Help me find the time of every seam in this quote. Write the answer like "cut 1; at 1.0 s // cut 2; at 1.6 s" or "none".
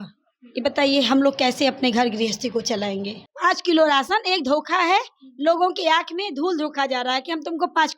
cut 1; at 3.2 s